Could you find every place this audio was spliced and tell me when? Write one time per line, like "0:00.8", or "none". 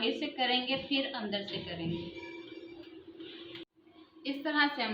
0:03.6